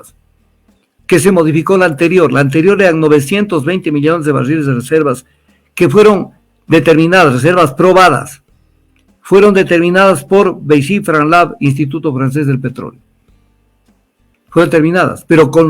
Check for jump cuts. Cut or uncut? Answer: uncut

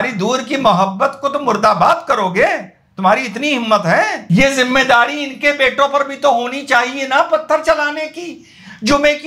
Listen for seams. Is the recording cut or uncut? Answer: cut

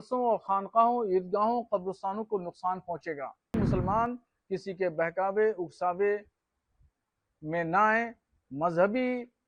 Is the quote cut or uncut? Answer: cut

